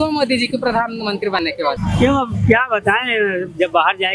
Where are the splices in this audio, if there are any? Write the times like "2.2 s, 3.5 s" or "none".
1.4 s